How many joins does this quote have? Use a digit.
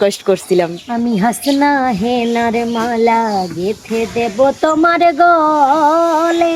0